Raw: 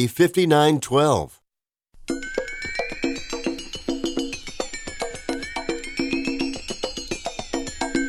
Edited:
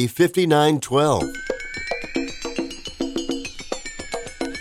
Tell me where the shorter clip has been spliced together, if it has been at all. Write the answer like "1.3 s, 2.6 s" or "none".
1.2 s